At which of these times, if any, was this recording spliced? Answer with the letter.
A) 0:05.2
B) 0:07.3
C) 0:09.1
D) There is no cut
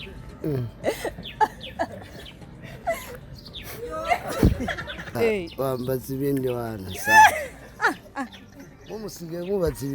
A